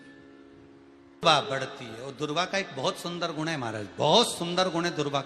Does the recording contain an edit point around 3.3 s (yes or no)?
no